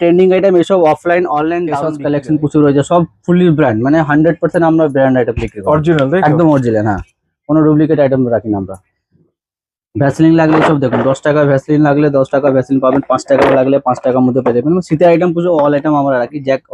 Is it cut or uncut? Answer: cut